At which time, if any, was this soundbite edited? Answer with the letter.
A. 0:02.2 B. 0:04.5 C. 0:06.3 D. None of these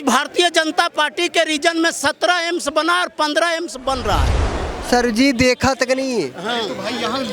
B